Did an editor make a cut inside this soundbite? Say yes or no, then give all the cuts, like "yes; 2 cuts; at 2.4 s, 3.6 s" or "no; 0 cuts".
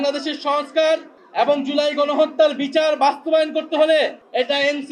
no; 0 cuts